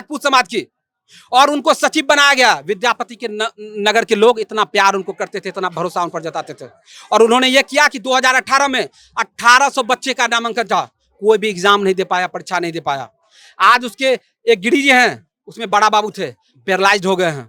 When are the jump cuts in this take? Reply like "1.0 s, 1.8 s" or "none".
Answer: none